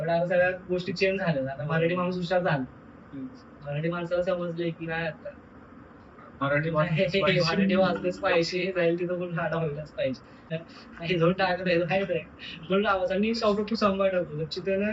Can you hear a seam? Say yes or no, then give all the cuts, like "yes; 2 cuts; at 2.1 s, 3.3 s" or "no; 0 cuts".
yes; 1 cut; at 10.5 s